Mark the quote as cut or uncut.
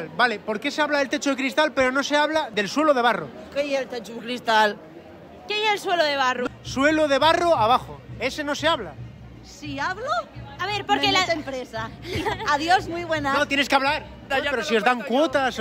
cut